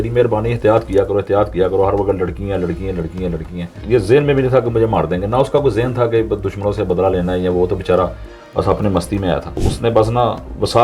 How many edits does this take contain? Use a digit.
2